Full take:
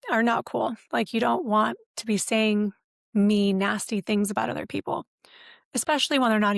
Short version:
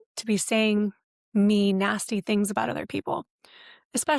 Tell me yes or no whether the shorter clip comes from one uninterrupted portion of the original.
yes